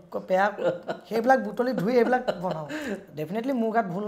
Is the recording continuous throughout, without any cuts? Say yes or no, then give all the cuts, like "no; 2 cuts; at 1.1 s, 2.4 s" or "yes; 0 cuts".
no; 1 cut; at 3.0 s